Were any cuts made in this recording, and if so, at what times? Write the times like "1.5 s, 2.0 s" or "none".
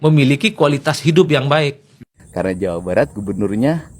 2.2 s